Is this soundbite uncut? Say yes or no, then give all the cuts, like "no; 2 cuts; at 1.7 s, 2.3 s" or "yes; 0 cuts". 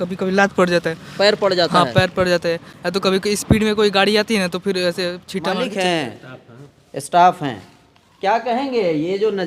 no; 1 cut; at 5.5 s